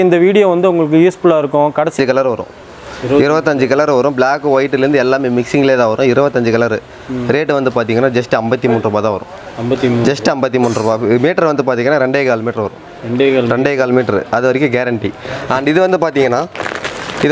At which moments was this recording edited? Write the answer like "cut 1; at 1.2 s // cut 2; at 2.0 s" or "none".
cut 1; at 1.9 s